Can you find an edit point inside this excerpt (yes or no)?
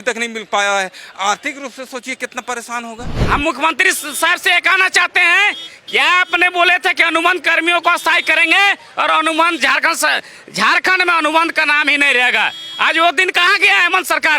yes